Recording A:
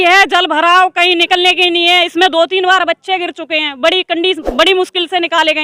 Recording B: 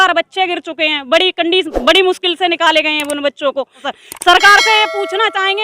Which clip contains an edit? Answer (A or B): B